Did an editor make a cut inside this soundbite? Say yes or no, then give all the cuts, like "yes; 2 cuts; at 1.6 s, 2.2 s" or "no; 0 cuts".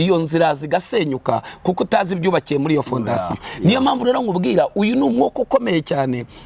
no; 0 cuts